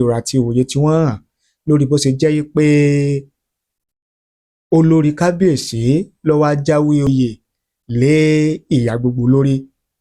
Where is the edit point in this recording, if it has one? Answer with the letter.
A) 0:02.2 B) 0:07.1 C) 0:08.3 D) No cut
B